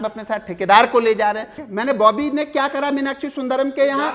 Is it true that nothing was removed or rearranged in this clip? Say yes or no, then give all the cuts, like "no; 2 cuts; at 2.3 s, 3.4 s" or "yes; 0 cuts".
no; 1 cut; at 1.5 s